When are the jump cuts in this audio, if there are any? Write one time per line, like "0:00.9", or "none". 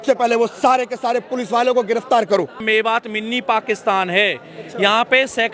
0:02.6